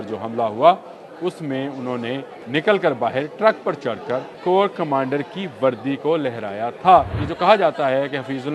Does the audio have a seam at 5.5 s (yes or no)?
no